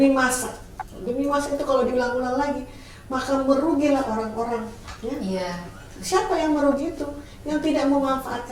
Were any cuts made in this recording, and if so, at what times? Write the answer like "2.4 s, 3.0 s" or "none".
none